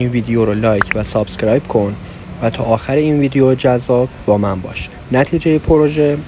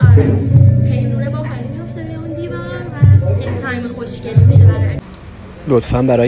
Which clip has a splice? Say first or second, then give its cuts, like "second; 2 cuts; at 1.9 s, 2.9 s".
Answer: second; 1 cut; at 5.0 s